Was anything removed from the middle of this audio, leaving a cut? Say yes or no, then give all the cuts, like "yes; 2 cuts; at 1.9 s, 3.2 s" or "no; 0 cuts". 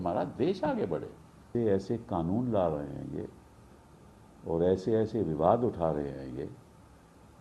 yes; 1 cut; at 1.5 s